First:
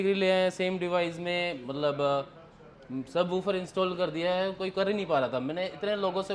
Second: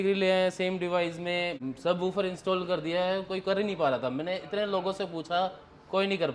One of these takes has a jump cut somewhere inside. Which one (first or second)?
second